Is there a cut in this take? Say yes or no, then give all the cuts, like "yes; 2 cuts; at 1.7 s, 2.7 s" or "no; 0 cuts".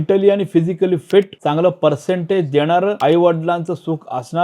yes; 2 cuts; at 1.3 s, 3.0 s